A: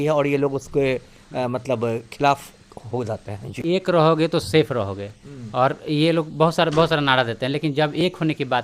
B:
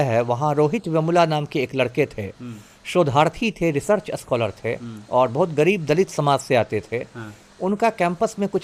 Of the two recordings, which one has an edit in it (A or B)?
A